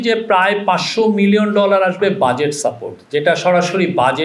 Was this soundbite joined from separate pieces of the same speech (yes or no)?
no